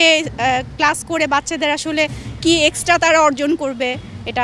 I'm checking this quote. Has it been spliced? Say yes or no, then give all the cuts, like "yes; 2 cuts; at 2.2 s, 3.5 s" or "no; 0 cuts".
no; 0 cuts